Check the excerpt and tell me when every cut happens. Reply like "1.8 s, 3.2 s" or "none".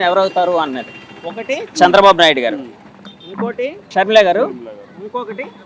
3.9 s